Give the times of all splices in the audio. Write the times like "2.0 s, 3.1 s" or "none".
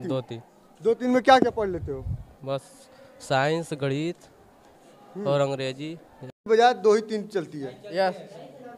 6.3 s